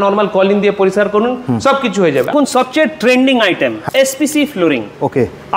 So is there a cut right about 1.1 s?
no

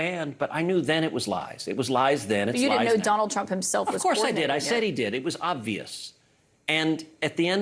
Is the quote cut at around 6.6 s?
yes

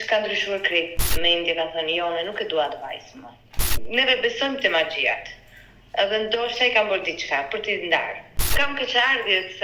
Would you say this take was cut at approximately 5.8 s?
no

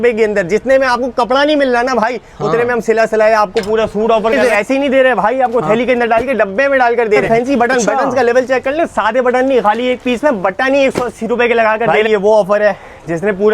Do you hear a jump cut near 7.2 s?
yes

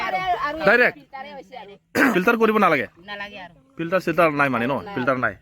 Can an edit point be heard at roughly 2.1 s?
yes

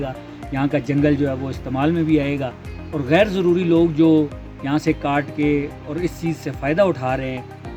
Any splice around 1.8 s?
no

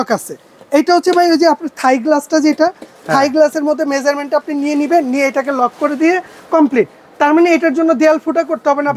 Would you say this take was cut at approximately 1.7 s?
no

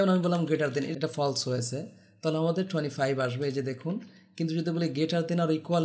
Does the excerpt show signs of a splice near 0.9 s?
yes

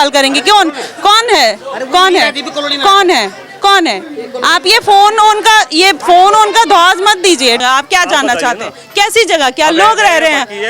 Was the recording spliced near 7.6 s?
yes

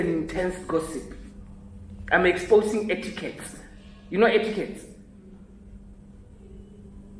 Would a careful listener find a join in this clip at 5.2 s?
no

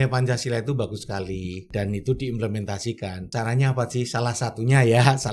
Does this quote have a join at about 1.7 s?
yes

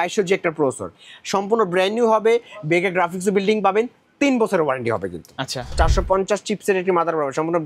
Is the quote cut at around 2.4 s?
no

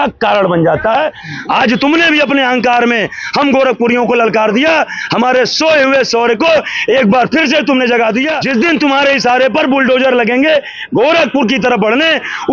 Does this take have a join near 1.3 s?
yes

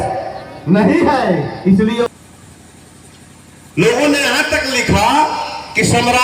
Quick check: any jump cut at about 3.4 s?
no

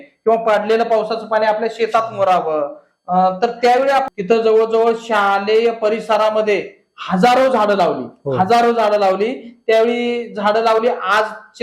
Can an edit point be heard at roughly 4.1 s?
yes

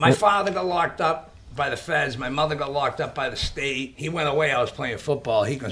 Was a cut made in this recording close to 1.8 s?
no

